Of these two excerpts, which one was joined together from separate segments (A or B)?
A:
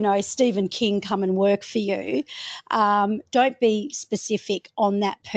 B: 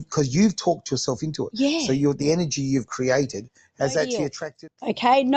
B